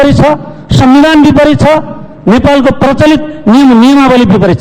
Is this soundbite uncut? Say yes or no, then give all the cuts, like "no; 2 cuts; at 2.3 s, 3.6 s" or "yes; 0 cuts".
yes; 0 cuts